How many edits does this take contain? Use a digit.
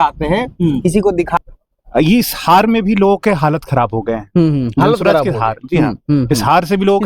1